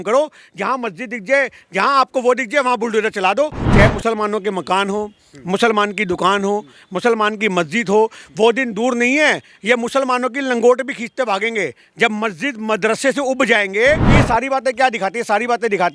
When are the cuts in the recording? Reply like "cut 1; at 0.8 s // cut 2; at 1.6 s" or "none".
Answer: cut 1; at 3.6 s // cut 2; at 14.1 s